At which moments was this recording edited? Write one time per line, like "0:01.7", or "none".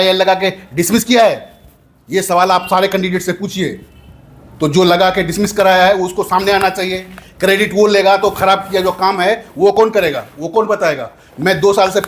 none